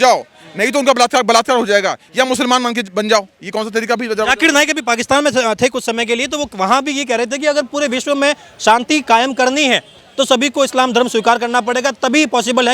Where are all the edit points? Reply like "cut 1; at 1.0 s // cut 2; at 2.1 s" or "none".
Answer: none